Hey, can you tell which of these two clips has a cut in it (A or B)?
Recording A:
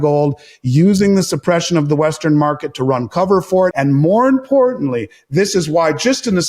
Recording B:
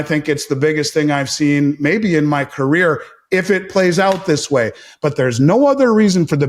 A